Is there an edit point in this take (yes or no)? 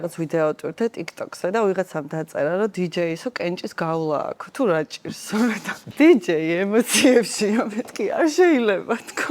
yes